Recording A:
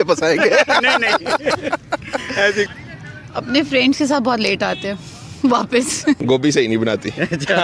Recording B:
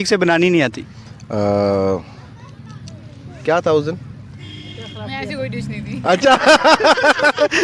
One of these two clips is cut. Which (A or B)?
A